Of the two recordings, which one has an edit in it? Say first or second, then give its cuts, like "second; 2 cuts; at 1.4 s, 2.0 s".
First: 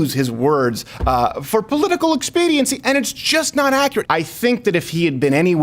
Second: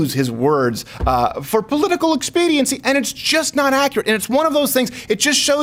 first; 1 cut; at 4.0 s